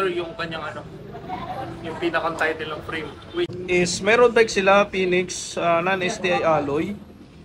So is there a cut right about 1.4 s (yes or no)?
no